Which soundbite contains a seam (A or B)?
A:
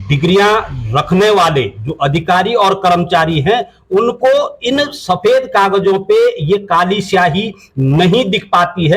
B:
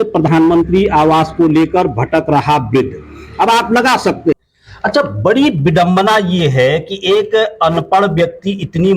B